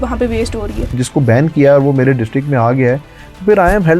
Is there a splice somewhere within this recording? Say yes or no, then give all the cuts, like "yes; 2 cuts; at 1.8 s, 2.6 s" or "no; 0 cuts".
yes; 1 cut; at 1.0 s